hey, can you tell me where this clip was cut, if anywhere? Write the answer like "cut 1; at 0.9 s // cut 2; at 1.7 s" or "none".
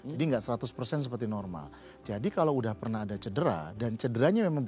none